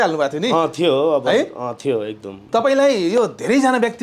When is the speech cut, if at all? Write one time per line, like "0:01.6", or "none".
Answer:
0:02.3